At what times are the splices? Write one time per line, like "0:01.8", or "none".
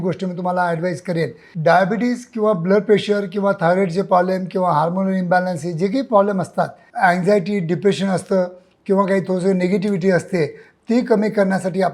0:01.4
0:06.8